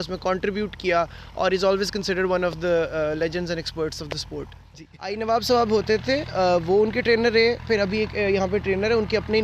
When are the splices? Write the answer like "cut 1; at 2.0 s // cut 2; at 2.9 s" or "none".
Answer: cut 1; at 5.1 s